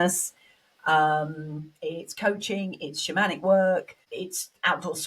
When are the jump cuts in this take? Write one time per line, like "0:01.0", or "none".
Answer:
0:04.0